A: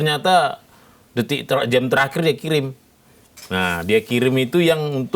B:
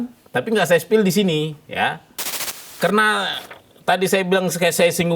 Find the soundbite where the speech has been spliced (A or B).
B